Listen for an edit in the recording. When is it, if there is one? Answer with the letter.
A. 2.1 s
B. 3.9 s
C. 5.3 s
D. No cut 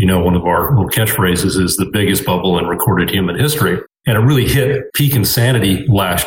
B